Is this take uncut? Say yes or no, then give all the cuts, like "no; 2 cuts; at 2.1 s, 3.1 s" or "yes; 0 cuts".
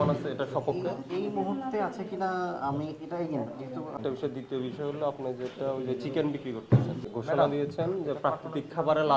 no; 2 cuts; at 4.0 s, 7.0 s